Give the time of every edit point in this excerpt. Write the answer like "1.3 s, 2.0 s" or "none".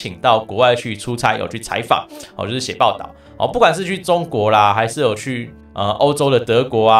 none